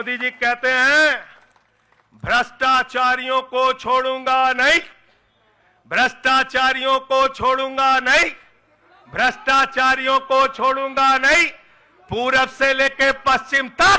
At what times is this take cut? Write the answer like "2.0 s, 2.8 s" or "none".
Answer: none

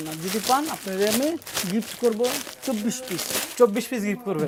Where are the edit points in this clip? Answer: none

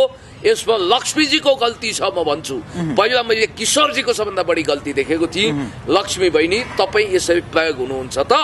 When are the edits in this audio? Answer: none

